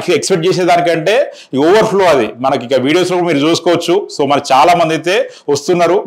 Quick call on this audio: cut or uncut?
uncut